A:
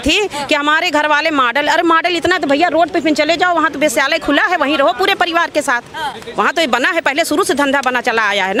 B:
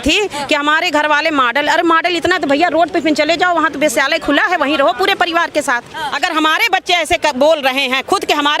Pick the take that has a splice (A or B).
B